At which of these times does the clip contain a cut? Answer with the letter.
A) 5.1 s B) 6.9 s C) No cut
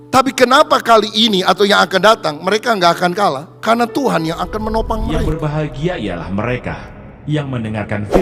A